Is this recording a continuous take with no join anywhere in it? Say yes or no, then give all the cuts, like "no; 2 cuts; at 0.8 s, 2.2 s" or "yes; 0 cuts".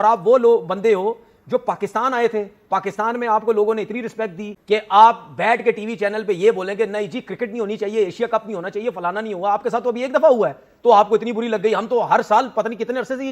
no; 1 cut; at 4.5 s